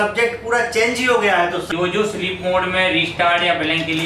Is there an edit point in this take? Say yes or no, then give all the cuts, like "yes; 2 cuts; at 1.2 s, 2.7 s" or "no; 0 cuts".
yes; 1 cut; at 1.7 s